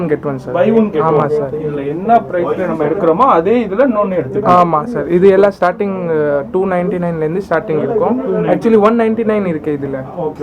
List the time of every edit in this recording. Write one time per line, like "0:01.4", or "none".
none